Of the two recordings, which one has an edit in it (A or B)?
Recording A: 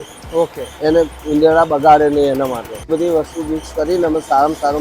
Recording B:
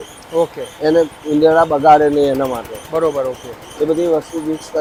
A